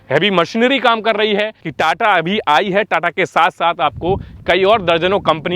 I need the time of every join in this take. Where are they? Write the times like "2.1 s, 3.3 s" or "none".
1.6 s